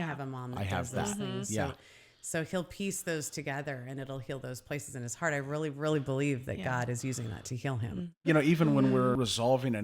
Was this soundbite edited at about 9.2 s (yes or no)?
yes